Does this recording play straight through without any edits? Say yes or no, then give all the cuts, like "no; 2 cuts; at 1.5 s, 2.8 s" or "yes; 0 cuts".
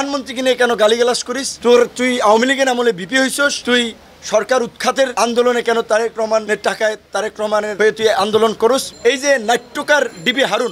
no; 1 cut; at 8.9 s